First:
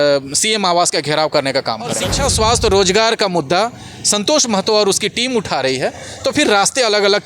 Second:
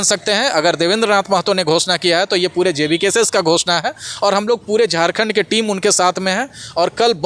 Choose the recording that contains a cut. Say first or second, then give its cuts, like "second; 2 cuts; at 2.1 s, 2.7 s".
first; 1 cut; at 2.1 s